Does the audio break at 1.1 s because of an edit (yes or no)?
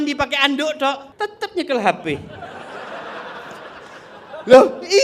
yes